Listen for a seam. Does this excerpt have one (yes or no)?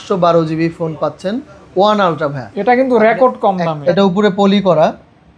yes